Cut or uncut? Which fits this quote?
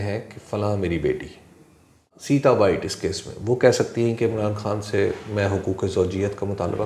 cut